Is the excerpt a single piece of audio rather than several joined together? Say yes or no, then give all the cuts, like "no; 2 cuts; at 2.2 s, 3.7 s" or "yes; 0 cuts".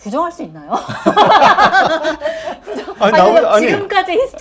yes; 0 cuts